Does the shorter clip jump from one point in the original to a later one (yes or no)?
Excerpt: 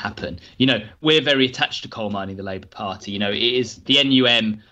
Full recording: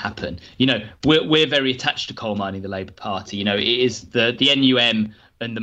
yes